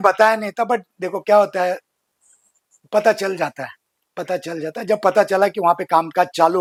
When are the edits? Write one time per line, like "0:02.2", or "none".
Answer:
none